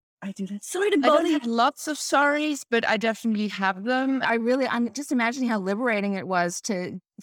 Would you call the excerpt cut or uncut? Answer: cut